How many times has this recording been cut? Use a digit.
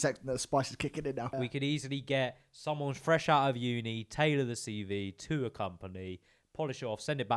1